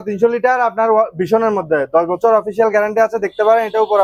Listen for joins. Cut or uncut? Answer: uncut